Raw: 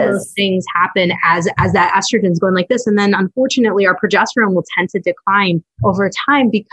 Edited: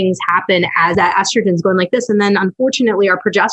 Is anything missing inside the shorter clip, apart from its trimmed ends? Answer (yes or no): yes